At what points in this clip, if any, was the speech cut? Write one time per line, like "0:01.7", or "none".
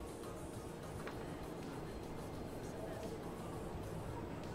none